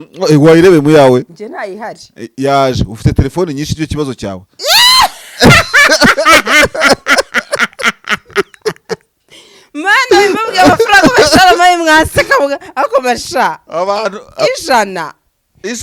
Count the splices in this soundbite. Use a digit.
0